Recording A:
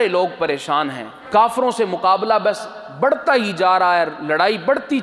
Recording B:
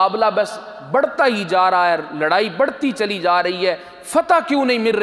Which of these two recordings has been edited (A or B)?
A